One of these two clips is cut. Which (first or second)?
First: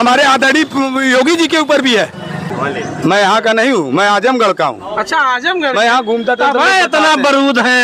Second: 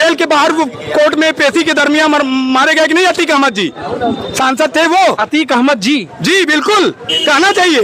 first